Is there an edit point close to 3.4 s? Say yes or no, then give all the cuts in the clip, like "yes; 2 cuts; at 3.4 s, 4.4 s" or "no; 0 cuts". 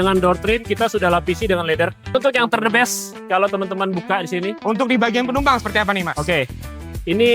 no; 1 cut; at 2.1 s